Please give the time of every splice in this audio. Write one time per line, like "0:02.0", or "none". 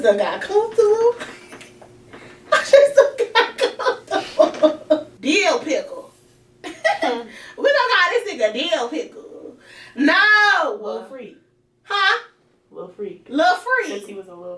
0:05.1